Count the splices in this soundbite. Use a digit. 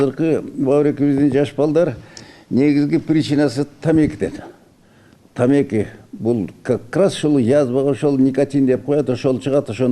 0